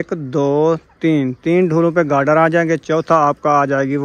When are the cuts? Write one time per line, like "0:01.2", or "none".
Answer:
none